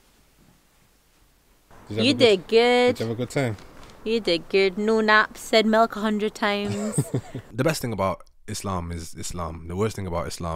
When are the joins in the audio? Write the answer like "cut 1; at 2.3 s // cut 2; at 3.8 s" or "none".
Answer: cut 1; at 1.7 s // cut 2; at 7.4 s